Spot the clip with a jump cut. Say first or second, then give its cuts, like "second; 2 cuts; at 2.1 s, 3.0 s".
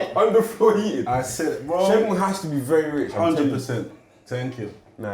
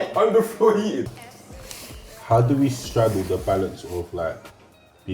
second; 1 cut; at 1.0 s